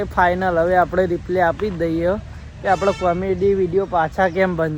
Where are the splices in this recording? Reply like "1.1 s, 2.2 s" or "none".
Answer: none